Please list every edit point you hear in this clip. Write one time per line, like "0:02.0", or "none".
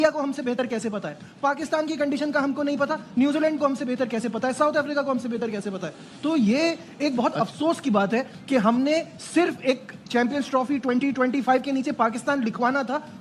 none